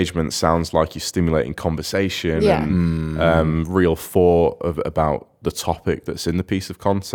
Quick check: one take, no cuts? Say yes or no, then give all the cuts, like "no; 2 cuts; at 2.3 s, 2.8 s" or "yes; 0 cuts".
yes; 0 cuts